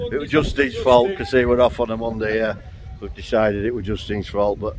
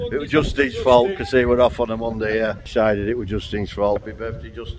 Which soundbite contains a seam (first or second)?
second